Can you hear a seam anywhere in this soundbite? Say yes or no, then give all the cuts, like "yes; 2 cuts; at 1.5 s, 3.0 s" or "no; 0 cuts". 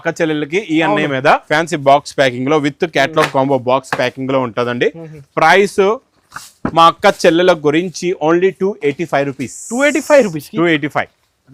yes; 1 cut; at 1.4 s